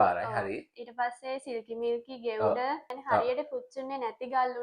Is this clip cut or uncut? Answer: cut